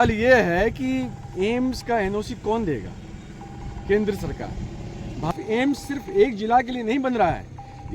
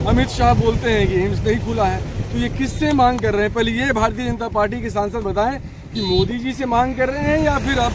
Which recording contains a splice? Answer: first; 1 cut; at 5.3 s

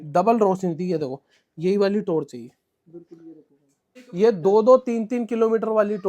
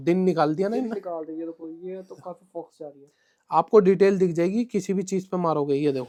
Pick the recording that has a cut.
first; 1 cut; at 4.0 s

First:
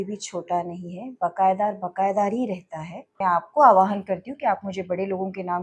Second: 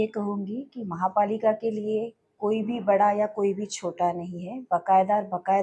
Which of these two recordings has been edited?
first; 1 cut; at 3.2 s

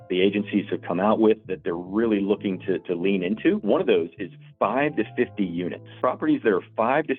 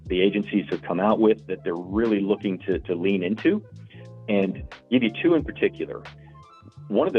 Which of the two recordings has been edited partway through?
first; 2 cuts; at 3.6 s, 5.8 s

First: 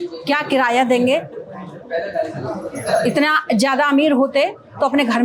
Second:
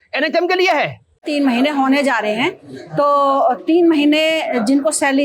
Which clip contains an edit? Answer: second; 1 cut; at 1.2 s

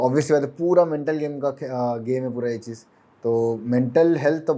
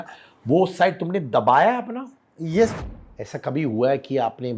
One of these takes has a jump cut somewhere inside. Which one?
second; 1 cut; at 2.7 s

